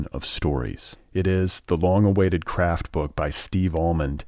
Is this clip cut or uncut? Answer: uncut